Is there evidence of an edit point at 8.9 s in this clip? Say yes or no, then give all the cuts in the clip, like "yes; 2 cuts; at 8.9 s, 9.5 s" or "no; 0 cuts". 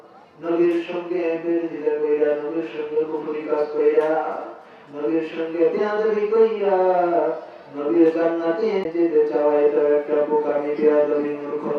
yes; 1 cut; at 8.9 s